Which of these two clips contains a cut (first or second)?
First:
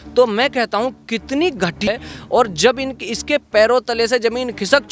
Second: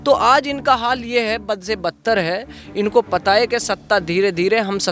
first